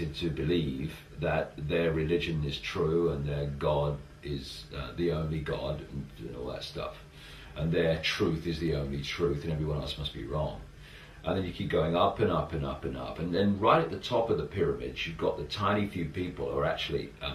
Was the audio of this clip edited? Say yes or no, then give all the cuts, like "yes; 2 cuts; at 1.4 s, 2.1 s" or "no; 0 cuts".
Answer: no; 0 cuts